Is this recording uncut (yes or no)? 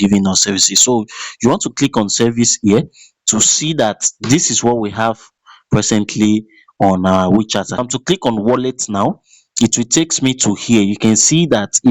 no